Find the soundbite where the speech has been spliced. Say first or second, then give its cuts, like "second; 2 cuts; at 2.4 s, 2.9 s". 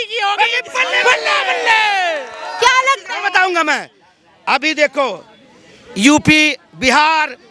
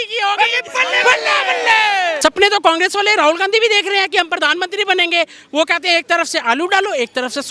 second; 1 cut; at 2.2 s